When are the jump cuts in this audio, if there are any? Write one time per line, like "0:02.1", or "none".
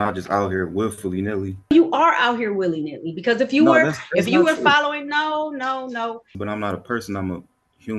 0:01.7
0:06.3